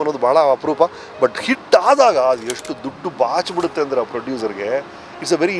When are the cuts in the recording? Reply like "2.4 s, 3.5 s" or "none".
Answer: none